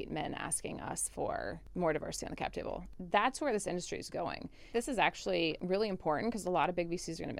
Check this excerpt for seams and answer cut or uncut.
cut